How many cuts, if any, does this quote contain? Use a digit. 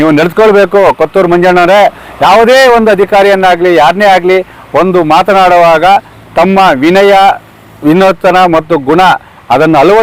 0